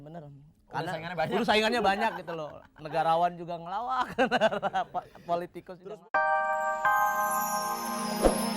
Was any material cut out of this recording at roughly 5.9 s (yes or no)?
yes